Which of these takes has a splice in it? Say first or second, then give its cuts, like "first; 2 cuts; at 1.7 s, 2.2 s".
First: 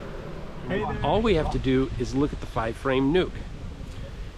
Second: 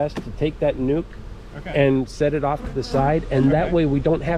first; 1 cut; at 0.9 s